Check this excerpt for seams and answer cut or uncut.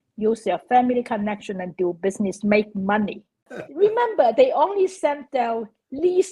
cut